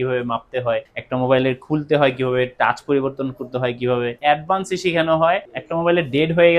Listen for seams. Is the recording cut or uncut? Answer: cut